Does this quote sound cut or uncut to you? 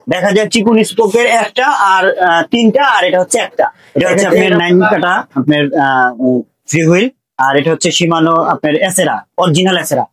cut